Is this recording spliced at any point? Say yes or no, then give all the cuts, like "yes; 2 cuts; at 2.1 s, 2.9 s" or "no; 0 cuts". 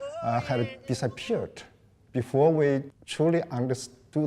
yes; 1 cut; at 3.0 s